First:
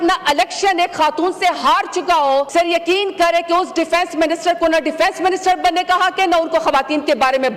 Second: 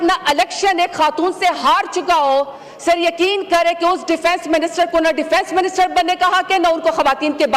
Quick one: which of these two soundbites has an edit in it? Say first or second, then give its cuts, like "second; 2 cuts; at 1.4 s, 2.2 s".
first; 1 cut; at 2.5 s